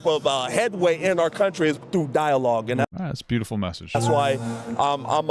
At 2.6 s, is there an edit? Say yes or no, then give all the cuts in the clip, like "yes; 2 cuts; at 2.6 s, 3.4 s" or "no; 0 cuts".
no; 0 cuts